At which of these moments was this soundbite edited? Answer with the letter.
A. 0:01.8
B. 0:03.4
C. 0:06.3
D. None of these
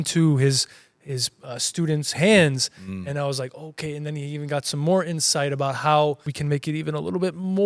C